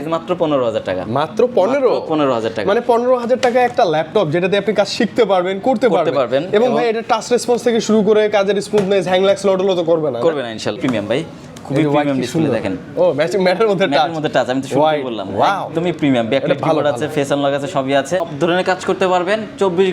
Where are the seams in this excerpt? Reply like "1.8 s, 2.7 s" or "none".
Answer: 10.8 s, 18.3 s